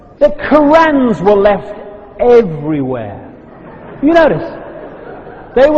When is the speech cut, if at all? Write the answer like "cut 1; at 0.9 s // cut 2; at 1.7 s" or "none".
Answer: cut 1; at 2.1 s